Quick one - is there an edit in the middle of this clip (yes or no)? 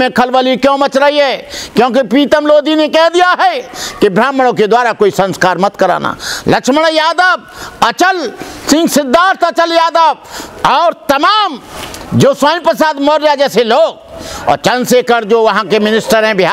no